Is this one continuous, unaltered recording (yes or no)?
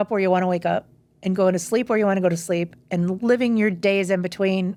yes